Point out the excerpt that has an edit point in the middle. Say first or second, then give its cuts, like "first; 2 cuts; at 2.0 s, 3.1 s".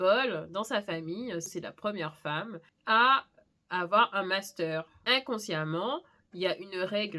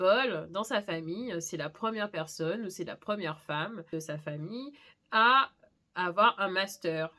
first; 3 cuts; at 1.5 s, 2.6 s, 5.0 s